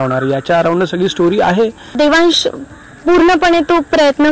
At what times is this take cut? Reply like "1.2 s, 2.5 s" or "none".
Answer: 1.9 s